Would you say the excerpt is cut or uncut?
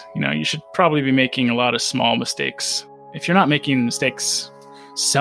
uncut